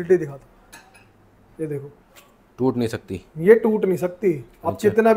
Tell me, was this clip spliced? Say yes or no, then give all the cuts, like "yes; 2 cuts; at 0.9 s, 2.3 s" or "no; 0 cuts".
no; 0 cuts